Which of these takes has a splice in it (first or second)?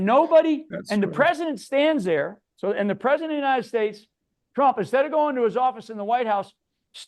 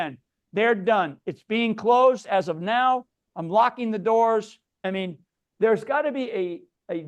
second